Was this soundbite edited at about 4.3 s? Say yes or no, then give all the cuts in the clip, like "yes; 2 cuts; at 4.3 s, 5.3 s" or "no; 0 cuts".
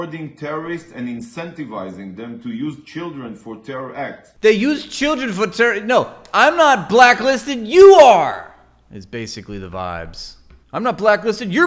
yes; 1 cut; at 4.3 s